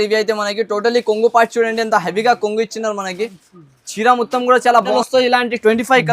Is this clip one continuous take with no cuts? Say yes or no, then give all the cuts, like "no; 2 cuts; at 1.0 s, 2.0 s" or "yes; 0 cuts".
no; 1 cut; at 4.9 s